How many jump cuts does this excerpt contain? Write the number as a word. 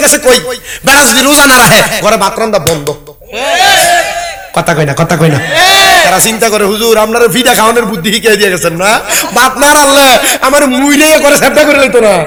zero